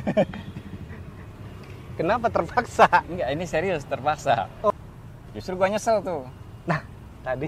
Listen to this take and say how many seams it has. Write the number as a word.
one